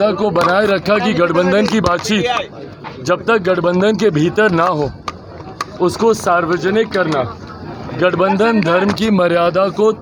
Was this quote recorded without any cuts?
yes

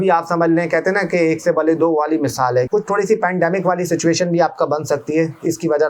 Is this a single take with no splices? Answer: no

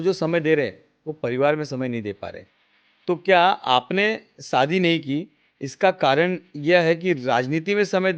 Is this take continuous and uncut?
yes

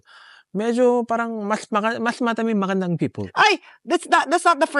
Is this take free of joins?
yes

